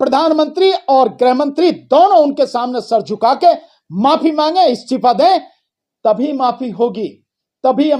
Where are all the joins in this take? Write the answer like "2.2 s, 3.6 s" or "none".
none